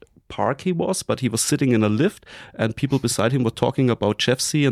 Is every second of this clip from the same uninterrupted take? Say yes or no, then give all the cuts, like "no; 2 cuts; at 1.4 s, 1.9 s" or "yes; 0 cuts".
yes; 0 cuts